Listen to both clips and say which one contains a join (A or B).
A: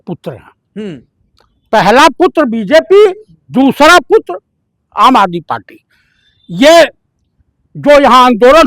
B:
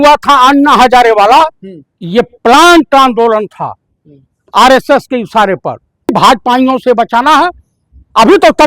B